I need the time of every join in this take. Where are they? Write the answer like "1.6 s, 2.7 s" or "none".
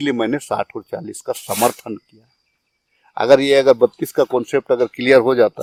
none